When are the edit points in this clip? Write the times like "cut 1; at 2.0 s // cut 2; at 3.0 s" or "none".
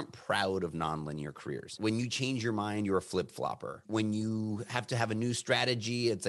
cut 1; at 1.8 s // cut 2; at 3.8 s

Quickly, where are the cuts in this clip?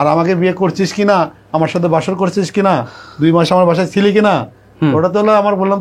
none

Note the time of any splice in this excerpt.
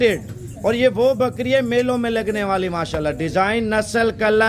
none

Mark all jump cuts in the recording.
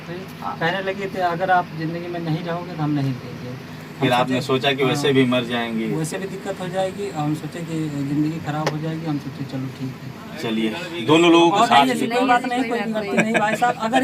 cut 1; at 11.8 s

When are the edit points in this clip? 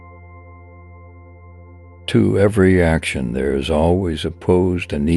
cut 1; at 2.1 s

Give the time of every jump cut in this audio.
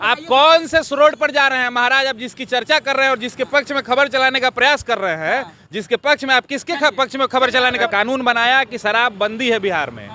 cut 1; at 7.9 s

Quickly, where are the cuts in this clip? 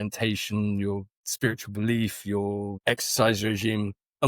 cut 1; at 1.2 s // cut 2; at 2.7 s

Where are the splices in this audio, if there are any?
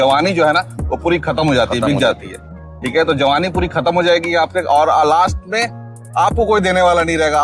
none

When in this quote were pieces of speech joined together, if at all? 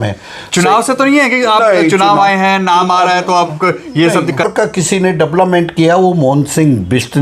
cut 1; at 4.4 s

